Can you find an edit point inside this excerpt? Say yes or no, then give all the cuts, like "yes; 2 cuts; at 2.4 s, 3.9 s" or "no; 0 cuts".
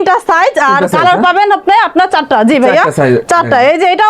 no; 0 cuts